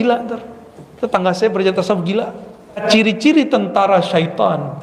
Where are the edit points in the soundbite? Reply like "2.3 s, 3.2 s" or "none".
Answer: 2.8 s